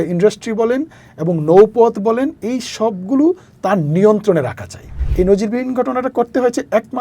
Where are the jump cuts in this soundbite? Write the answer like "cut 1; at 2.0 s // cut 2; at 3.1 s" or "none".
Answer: cut 1; at 5.0 s

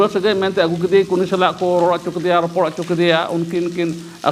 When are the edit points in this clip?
none

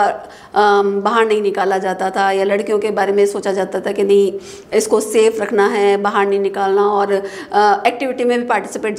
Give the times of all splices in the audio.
none

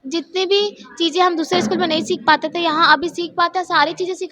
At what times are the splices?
none

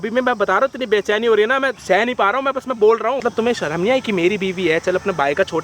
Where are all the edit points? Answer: cut 1; at 1.8 s // cut 2; at 3.2 s

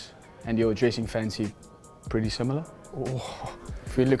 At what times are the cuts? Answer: cut 1; at 3.2 s

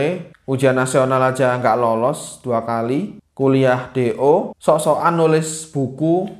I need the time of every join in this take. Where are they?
none

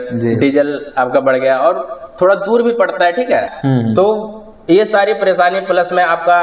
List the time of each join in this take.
cut 1; at 3.5 s

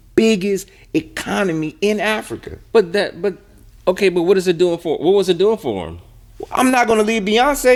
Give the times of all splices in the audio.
none

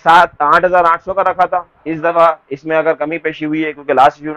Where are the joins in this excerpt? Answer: none

